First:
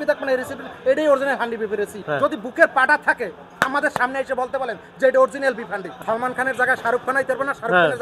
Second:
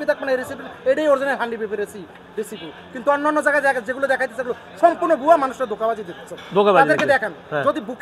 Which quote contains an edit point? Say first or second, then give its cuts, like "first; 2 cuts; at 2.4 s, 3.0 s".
first; 2 cuts; at 2.0 s, 5.8 s